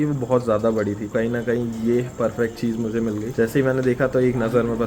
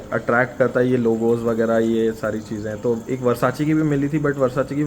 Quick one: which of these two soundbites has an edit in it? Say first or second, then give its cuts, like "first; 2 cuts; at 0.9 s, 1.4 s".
first; 2 cuts; at 1.1 s, 3.3 s